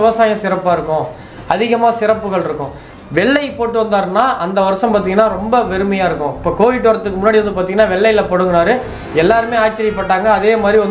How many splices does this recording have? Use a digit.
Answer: 0